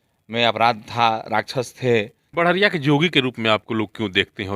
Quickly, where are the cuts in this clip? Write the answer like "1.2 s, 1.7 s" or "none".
2.4 s